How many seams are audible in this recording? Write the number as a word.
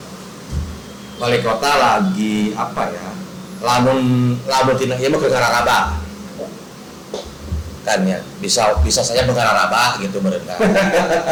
zero